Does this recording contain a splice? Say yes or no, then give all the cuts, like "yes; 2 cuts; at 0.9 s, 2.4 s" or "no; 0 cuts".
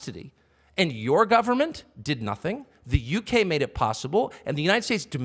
no; 0 cuts